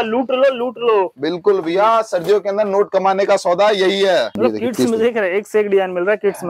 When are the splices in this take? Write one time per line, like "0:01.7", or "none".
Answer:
0:04.4